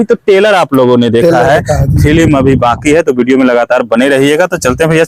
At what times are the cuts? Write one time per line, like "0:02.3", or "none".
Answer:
none